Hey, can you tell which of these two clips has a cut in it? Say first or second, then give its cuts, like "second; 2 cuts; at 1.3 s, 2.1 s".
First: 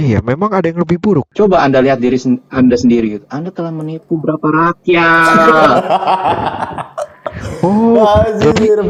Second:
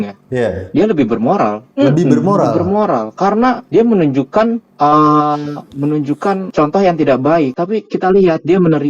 second; 2 cuts; at 6.5 s, 7.6 s